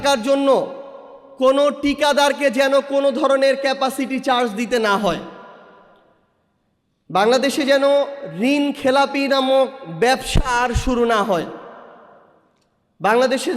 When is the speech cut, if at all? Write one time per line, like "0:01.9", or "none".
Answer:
none